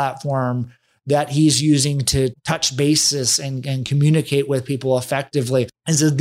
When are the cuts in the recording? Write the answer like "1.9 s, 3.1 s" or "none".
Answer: 2.4 s